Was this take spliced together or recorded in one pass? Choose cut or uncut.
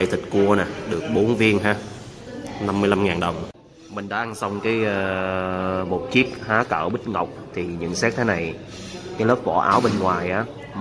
cut